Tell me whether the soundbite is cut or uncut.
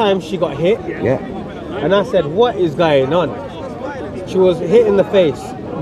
uncut